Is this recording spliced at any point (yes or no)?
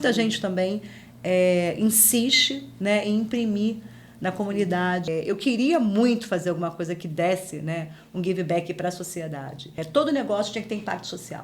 yes